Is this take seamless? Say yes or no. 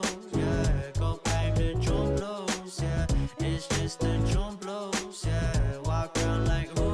no